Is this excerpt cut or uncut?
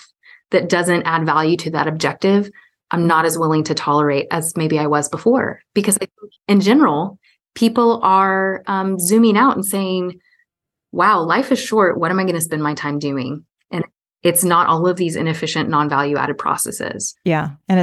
uncut